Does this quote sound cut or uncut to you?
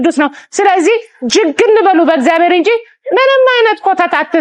uncut